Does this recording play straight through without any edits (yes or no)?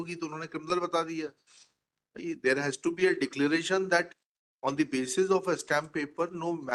yes